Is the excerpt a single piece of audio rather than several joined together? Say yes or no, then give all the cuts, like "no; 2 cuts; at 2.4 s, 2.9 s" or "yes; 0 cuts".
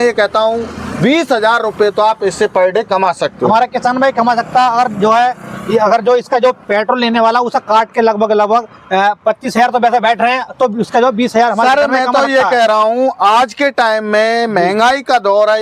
yes; 0 cuts